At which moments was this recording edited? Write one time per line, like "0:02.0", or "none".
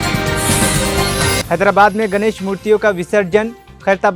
0:01.4